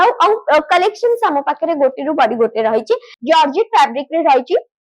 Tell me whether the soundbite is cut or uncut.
cut